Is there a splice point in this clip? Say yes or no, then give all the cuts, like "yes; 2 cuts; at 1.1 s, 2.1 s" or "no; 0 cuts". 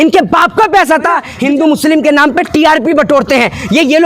yes; 1 cut; at 1.3 s